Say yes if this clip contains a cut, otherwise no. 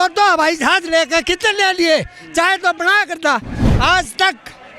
yes